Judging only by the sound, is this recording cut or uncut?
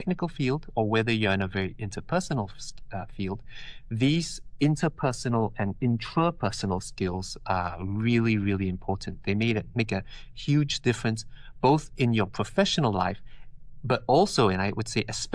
uncut